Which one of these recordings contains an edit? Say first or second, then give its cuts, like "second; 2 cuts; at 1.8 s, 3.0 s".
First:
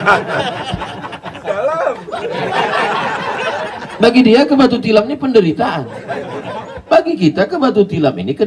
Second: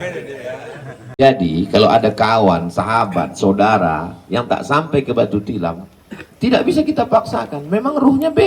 second; 1 cut; at 1.2 s